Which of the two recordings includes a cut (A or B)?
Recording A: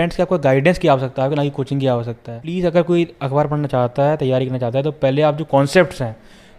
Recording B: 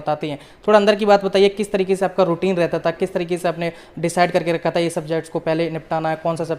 A